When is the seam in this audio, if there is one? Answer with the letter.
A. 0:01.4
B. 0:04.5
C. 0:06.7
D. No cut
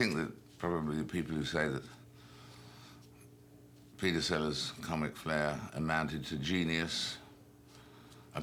D